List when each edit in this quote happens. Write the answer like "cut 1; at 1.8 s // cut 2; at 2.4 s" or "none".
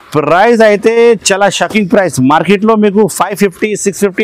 none